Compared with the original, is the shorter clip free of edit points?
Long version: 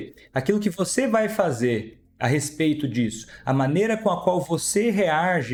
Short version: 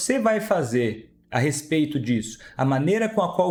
yes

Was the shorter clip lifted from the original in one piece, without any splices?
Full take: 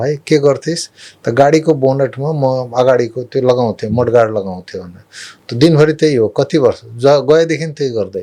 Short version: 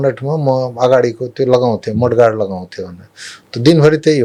yes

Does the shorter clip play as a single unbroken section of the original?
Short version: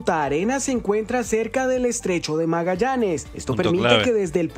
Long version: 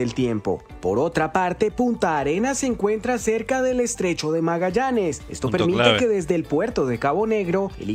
yes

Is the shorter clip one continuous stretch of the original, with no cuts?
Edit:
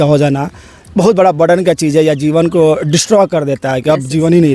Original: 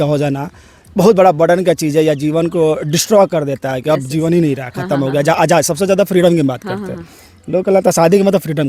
yes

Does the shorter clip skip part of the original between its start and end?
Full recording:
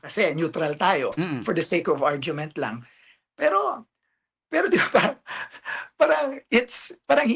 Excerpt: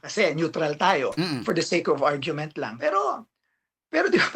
yes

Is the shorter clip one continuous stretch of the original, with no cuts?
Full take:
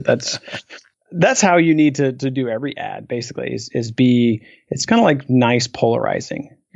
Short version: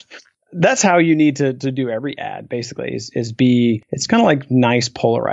no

